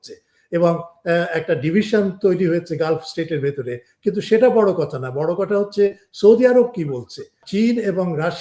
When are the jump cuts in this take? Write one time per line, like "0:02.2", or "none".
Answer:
0:07.4